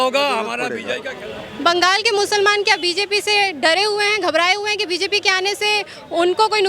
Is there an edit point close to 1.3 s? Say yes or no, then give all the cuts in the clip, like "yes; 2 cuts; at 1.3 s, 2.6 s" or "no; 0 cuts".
yes; 1 cut; at 1.3 s